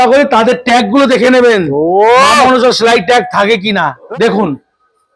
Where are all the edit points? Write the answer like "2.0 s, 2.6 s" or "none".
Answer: 4.0 s